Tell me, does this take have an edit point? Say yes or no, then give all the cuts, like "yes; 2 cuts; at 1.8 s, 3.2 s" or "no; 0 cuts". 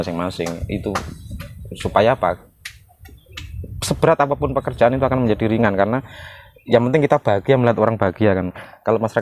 no; 0 cuts